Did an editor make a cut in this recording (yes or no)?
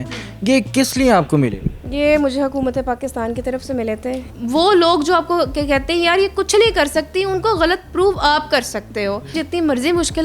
yes